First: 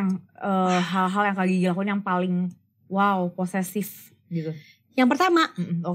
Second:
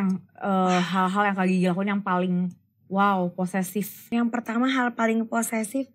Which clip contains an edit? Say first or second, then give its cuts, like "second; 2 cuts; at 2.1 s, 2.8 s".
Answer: second; 1 cut; at 4.0 s